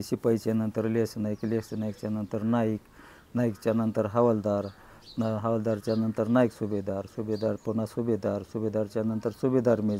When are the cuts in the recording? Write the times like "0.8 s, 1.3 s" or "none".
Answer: none